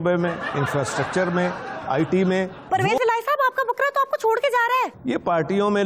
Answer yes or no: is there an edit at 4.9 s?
no